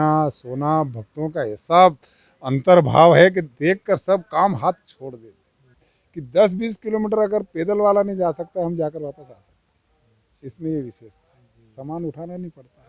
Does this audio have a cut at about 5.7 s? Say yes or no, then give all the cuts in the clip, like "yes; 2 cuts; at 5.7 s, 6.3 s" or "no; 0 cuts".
yes; 1 cut; at 5.7 s